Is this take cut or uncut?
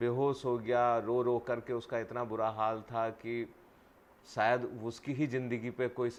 uncut